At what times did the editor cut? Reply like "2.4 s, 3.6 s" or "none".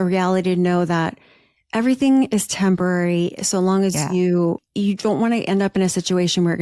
4.7 s